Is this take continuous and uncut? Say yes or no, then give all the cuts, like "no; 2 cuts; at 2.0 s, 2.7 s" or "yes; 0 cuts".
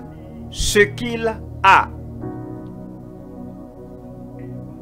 no; 1 cut; at 2.5 s